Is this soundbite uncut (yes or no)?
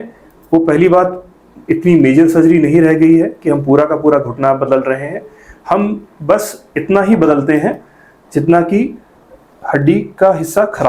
yes